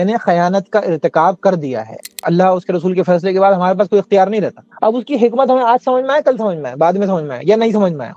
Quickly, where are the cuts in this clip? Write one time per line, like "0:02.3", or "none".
0:02.2
0:04.6